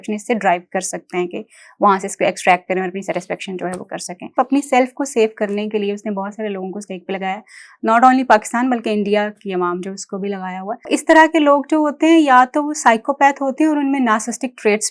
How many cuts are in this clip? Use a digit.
2